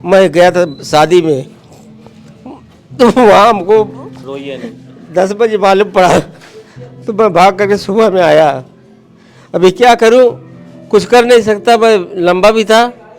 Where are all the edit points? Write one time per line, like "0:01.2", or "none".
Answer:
none